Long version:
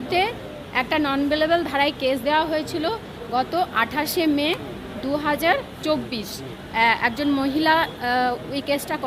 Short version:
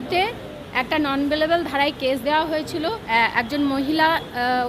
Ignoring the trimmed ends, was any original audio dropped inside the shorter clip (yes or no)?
yes